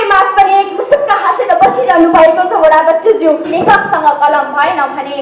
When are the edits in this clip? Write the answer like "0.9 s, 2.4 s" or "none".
3.5 s